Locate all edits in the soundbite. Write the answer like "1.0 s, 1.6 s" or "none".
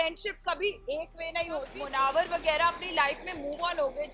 1.8 s